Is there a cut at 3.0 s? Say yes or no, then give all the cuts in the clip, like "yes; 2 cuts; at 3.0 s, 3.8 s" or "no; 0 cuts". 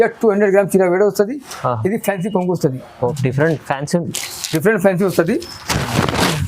yes; 1 cut; at 3.0 s